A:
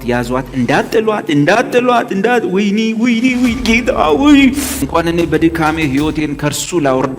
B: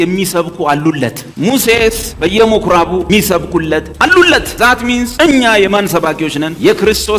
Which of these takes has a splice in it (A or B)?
A